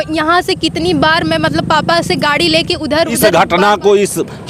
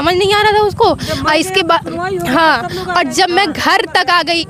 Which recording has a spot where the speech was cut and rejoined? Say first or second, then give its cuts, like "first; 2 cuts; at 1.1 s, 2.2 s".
first; 1 cut; at 3.2 s